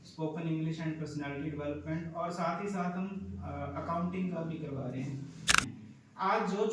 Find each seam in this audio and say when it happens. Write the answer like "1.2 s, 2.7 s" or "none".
5.6 s